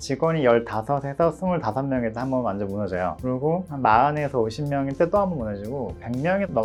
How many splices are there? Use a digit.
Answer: 0